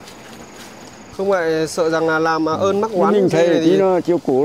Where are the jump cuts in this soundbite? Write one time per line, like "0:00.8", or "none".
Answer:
0:01.0

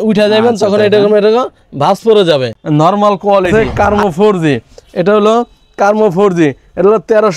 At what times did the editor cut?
0:02.6
0:03.5

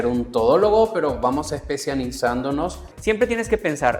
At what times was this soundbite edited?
0:02.9

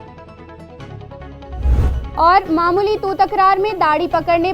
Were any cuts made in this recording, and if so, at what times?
0:01.8

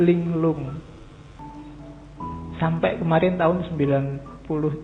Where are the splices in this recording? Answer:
0:01.4

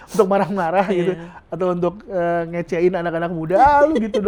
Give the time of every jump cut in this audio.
none

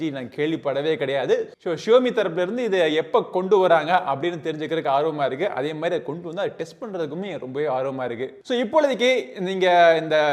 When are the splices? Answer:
none

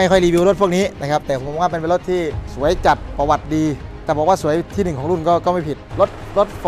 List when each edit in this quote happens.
0:02.4
0:03.9
0:05.8

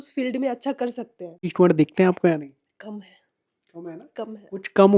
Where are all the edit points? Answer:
0:01.5

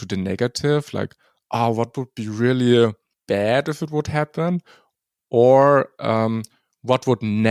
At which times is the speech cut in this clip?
0:03.1

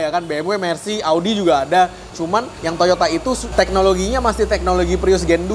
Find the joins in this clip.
0:02.3
0:03.5

